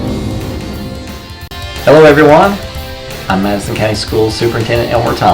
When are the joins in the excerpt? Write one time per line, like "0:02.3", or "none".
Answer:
0:01.3